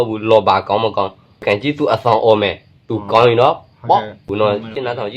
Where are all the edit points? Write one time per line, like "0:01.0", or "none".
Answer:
0:01.4
0:04.3